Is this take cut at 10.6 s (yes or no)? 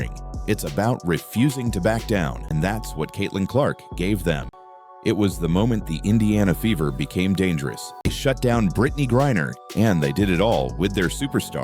no